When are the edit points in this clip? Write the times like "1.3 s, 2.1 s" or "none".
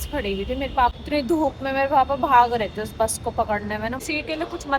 0.9 s, 4.0 s